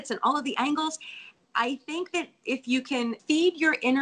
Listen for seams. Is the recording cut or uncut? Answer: cut